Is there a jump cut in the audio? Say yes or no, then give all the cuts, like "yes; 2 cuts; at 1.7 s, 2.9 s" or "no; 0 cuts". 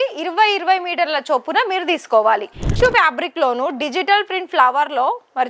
yes; 1 cut; at 2.7 s